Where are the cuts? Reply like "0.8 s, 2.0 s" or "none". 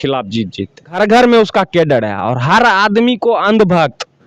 0.9 s